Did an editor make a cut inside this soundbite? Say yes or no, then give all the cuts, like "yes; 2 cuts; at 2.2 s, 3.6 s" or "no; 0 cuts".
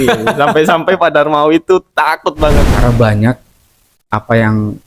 yes; 1 cut; at 2.7 s